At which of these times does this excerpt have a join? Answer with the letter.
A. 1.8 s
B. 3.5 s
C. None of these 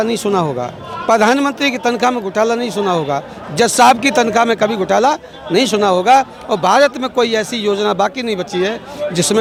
C